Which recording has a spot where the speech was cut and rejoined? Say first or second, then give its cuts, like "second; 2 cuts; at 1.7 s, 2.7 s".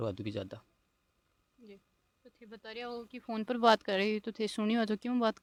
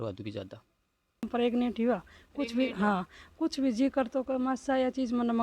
second; 1 cut; at 1.3 s